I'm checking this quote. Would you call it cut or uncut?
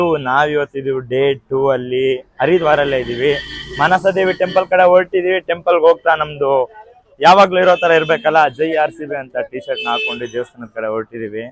uncut